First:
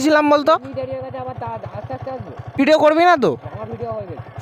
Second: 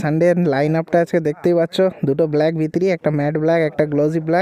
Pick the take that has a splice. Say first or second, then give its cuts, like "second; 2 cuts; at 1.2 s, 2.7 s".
first; 1 cut; at 2.6 s